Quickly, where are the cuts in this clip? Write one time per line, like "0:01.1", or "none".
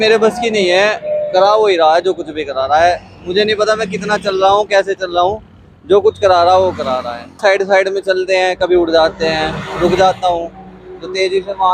0:07.4